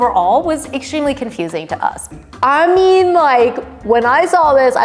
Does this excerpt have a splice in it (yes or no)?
yes